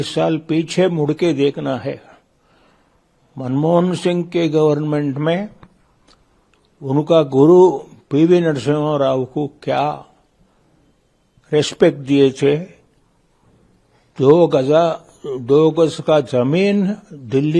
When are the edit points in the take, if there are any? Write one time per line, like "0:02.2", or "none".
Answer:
none

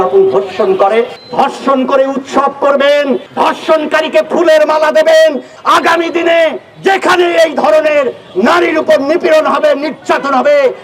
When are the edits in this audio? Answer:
0:01.2
0:03.3
0:05.5

